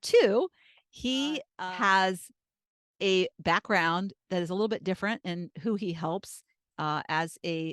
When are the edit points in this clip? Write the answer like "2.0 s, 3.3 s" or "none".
1.5 s